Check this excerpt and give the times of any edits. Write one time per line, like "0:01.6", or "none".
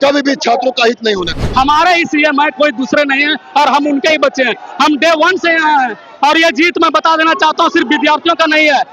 0:01.4

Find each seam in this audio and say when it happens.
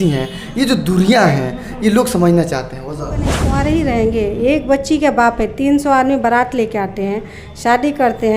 0:03.4

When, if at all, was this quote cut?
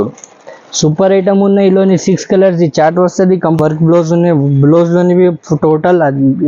0:03.6

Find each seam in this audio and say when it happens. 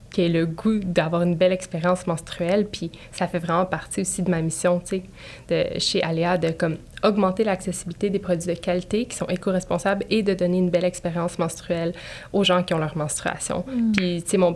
none

